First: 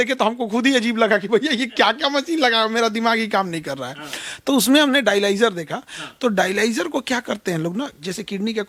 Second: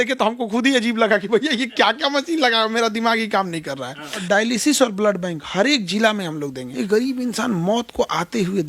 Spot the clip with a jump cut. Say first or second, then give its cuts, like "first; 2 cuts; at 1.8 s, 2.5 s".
second; 2 cuts; at 4.2 s, 6.6 s